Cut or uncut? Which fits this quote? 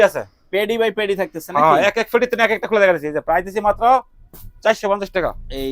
uncut